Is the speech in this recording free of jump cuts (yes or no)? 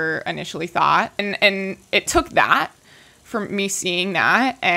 no